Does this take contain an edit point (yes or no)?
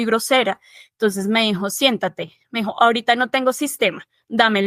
no